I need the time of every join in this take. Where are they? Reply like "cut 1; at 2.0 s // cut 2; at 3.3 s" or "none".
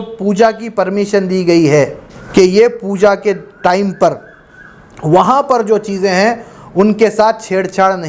cut 1; at 2.2 s